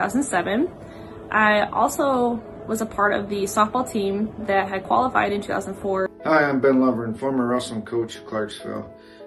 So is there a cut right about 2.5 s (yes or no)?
no